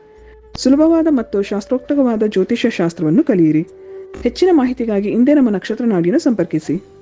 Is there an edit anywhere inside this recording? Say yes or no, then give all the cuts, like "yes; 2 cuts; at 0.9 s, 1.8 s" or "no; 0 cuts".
no; 0 cuts